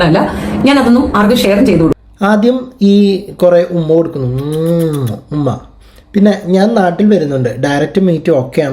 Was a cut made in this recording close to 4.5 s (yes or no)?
no